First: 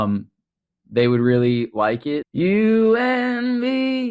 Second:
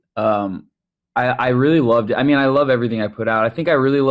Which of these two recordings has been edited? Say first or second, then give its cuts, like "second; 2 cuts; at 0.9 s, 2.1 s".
first; 1 cut; at 2.3 s